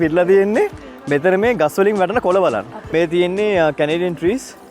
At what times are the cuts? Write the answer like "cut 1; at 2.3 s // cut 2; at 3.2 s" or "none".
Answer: cut 1; at 2.8 s

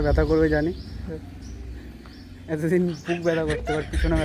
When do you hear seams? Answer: none

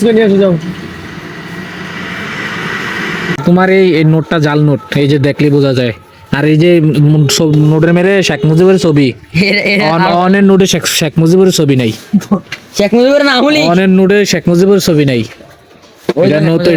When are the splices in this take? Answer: cut 1; at 3.4 s

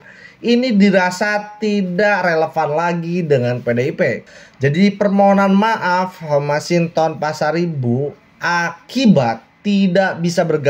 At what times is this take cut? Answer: cut 1; at 4.3 s

